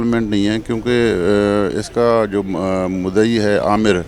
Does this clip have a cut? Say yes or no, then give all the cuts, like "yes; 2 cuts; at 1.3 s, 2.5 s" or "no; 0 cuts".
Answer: no; 0 cuts